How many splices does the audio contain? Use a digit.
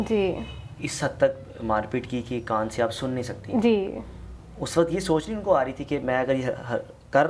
0